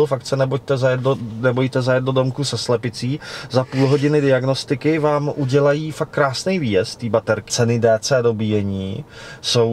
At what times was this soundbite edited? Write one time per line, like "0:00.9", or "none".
0:07.5

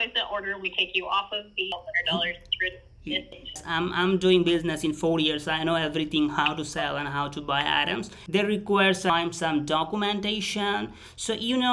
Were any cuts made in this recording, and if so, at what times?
0:01.7
0:03.6
0:08.1

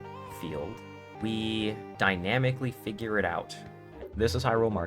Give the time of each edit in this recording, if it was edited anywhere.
0:01.1
0:01.9
0:04.0

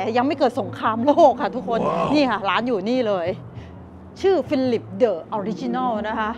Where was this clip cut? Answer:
none

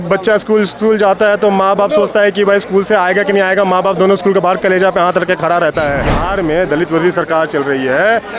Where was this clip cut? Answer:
0:06.2

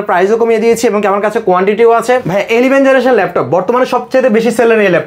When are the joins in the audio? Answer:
0:02.3

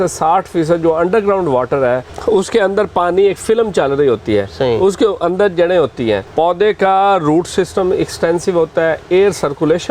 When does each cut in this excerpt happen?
0:02.1
0:06.3

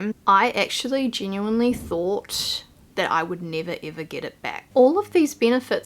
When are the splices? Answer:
0:04.6

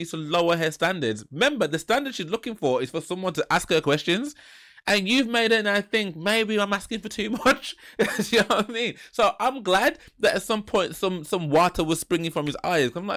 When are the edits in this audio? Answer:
none

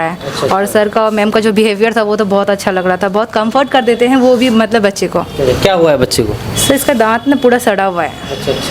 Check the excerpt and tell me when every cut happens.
none

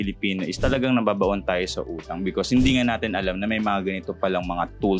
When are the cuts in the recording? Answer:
none

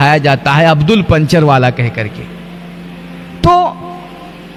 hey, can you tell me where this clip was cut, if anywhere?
none

